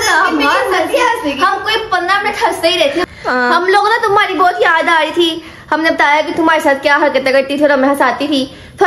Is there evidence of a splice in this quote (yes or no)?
yes